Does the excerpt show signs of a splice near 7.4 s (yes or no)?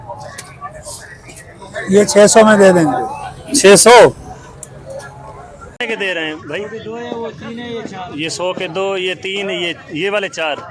no